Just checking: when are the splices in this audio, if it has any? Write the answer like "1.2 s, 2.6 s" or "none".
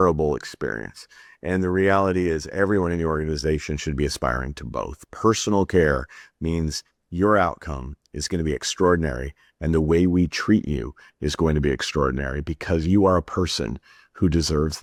none